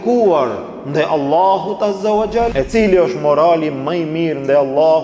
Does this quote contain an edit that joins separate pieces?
yes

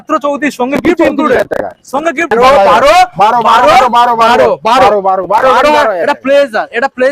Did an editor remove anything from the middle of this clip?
yes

